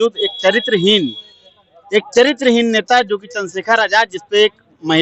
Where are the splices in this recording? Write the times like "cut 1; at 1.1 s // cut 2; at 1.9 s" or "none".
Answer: none